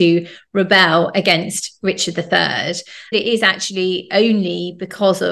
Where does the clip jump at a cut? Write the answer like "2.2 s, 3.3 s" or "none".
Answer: 3.1 s